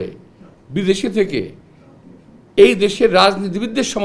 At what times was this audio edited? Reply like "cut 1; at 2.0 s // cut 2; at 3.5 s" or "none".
none